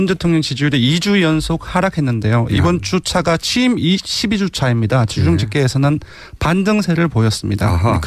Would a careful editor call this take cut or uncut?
cut